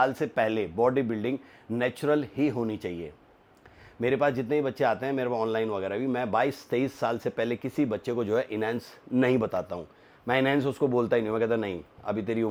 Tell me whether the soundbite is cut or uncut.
uncut